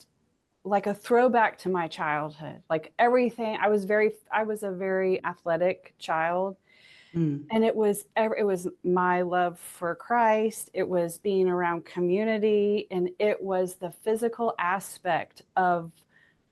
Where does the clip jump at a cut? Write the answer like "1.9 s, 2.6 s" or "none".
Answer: none